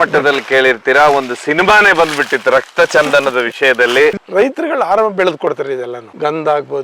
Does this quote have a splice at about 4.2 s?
yes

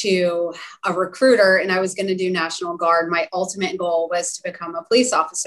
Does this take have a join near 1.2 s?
no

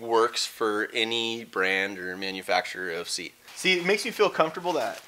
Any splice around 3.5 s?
yes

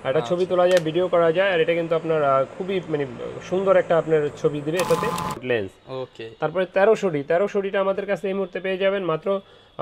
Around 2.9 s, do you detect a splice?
no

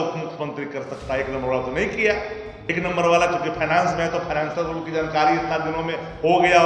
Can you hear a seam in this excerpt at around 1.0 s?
no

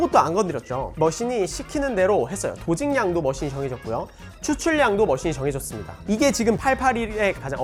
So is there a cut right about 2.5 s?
no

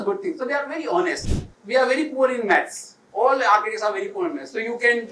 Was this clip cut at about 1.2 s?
yes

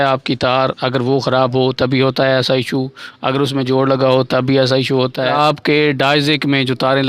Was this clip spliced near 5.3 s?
yes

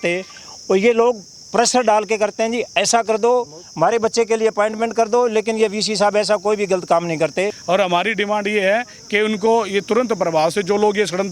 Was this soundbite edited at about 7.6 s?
yes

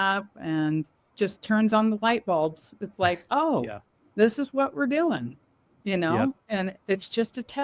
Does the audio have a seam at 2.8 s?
no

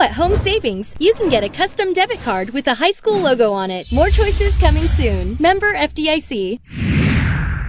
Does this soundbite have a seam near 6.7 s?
yes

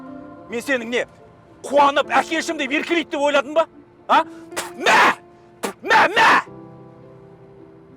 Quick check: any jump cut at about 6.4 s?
yes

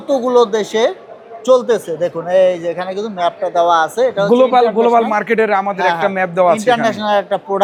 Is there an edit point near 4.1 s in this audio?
no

